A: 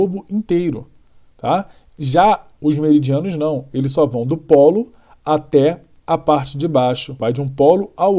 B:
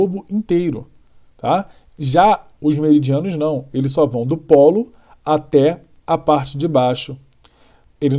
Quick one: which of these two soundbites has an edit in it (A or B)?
A